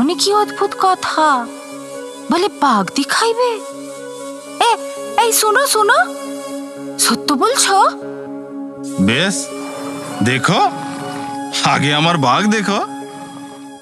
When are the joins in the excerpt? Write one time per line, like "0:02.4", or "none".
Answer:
none